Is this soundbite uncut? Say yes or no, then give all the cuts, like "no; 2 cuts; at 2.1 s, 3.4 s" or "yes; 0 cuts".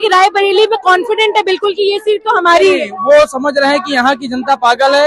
yes; 0 cuts